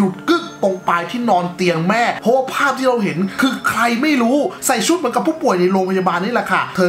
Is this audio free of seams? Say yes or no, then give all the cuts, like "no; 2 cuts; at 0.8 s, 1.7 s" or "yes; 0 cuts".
no; 2 cuts; at 2.2 s, 4.6 s